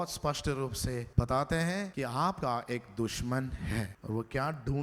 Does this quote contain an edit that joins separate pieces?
yes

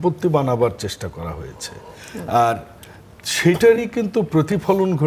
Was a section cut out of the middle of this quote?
no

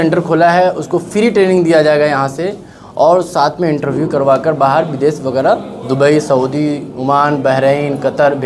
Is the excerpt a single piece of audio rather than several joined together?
yes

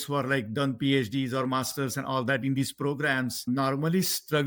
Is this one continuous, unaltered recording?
no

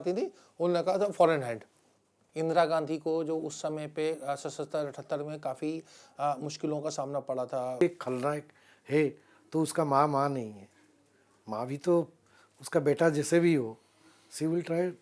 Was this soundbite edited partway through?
yes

